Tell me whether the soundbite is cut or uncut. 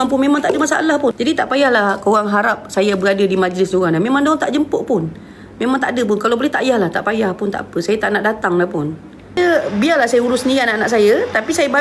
cut